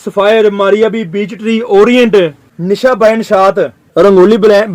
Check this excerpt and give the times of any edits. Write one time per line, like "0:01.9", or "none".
0:02.5
0:03.8